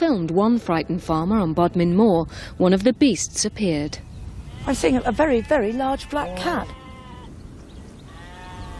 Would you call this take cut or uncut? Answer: cut